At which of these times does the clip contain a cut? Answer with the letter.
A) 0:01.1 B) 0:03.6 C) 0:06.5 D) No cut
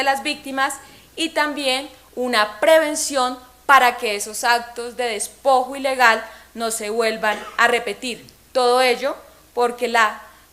C